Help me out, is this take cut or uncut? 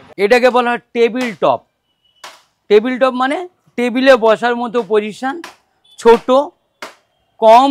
uncut